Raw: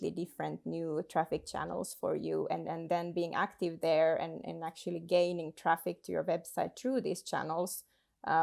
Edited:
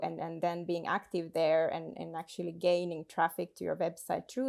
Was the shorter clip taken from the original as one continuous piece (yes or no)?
yes